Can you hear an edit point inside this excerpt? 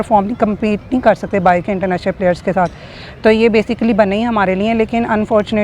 no; 0 cuts

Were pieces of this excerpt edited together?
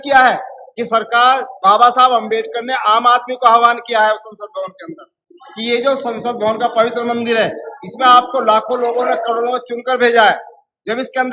no; 0 cuts

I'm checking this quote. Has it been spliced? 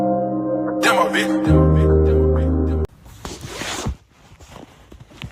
yes; 1 cut; at 2.9 s

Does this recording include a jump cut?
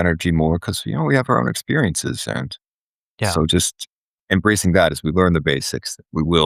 no; 0 cuts

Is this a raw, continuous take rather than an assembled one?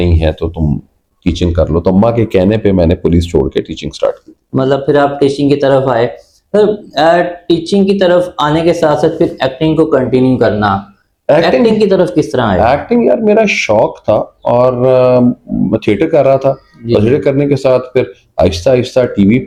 yes; 0 cuts

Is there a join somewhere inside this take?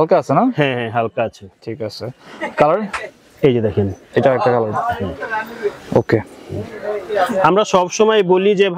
no; 0 cuts

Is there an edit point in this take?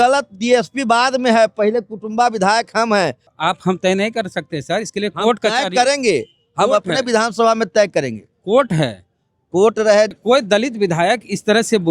yes; 2 cuts; at 3.3 s, 10.2 s

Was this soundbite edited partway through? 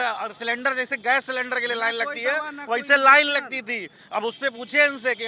no; 0 cuts

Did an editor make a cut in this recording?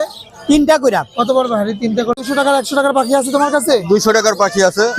yes; 1 cut; at 2.1 s

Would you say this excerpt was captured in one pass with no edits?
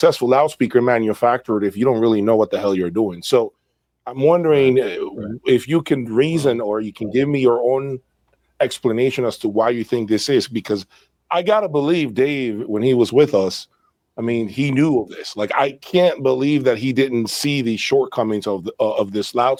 yes; 0 cuts

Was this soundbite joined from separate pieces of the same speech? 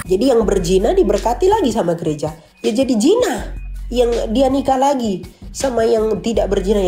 no; 0 cuts

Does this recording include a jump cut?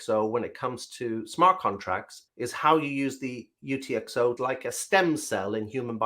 yes; 1 cut; at 4.4 s

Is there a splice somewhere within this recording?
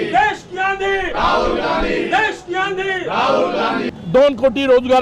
yes; 1 cut; at 3.9 s

